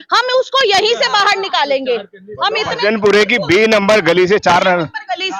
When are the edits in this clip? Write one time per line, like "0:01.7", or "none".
none